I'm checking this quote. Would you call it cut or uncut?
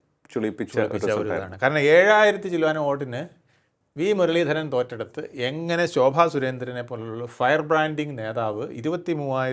uncut